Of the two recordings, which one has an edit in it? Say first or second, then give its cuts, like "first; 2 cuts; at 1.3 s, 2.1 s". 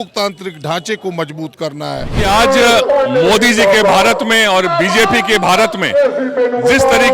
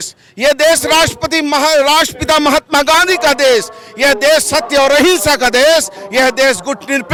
first; 1 cut; at 2.2 s